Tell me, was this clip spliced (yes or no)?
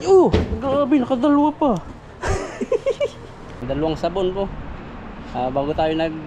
yes